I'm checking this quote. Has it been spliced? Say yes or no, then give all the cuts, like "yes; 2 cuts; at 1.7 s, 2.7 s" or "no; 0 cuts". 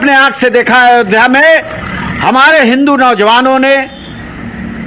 no; 0 cuts